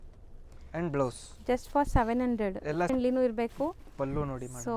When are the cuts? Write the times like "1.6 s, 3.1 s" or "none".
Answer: 2.9 s